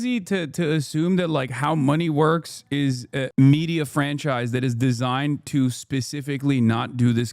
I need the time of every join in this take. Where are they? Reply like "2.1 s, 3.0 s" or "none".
3.3 s

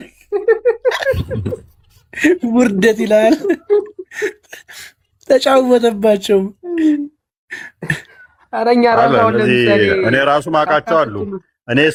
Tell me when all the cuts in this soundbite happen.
none

